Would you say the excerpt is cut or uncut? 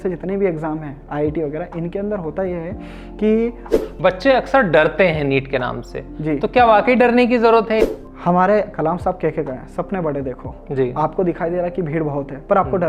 cut